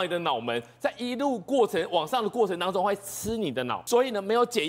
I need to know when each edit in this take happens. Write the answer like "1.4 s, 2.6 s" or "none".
3.8 s